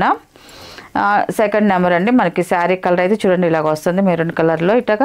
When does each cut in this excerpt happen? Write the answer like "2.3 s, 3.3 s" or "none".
none